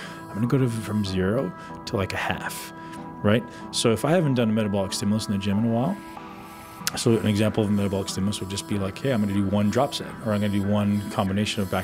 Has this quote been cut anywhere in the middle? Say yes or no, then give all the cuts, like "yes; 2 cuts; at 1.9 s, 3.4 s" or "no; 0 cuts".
no; 0 cuts